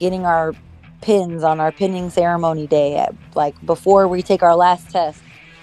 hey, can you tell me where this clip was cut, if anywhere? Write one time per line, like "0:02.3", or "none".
none

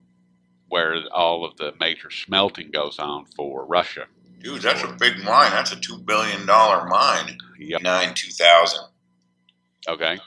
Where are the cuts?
none

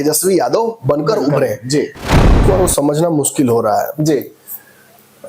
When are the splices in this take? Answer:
0:02.4

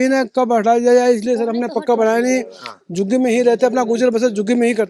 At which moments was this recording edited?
none

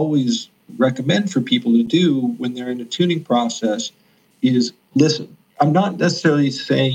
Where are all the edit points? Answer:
none

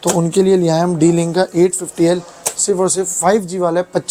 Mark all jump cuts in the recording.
none

